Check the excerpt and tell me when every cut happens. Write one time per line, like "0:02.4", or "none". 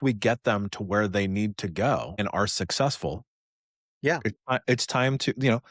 0:02.1